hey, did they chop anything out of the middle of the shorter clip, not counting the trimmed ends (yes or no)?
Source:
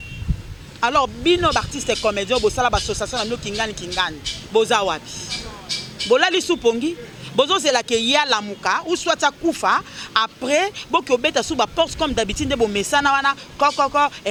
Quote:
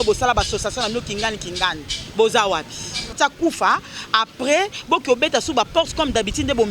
yes